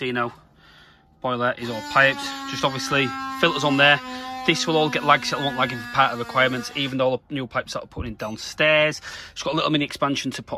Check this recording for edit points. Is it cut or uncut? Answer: uncut